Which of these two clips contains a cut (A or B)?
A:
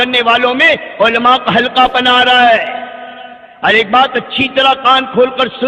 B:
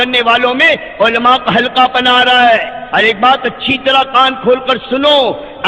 B